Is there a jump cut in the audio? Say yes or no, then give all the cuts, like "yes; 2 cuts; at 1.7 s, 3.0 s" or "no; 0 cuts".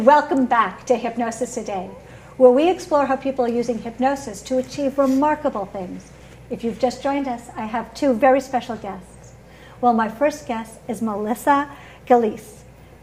no; 0 cuts